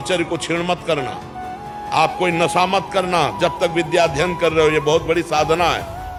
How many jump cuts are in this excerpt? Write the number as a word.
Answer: zero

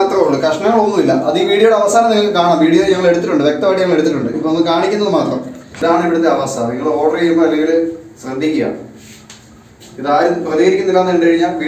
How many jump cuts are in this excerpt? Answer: one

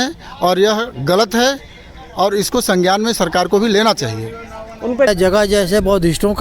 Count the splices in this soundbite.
one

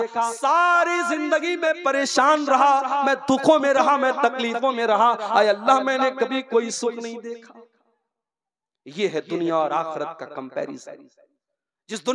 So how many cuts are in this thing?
zero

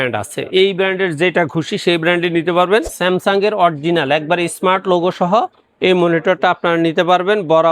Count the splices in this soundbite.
one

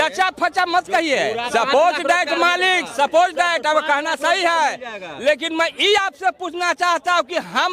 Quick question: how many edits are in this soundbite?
one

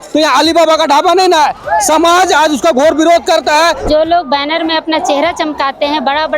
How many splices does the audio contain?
one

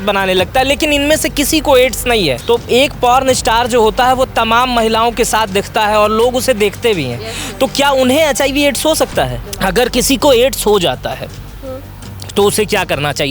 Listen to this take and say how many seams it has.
two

